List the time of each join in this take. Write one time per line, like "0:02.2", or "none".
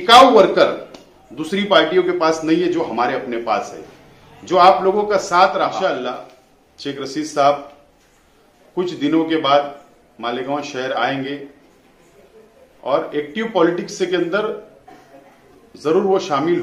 0:05.7